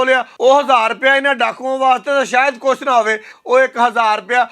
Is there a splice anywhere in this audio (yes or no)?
yes